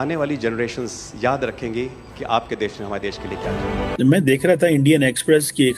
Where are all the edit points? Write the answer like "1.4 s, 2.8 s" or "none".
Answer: 3.9 s